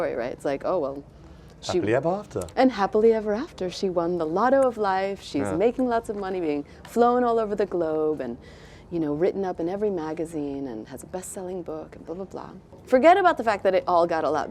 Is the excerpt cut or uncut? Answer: cut